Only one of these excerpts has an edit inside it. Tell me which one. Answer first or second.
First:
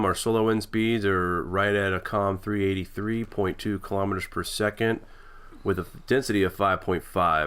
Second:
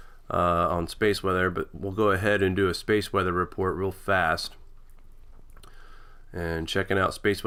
first